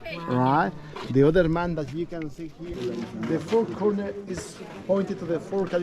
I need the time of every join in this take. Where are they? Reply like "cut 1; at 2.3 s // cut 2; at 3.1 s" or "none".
cut 1; at 2.7 s